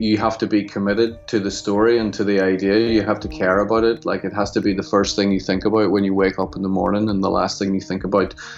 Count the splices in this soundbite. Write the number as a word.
zero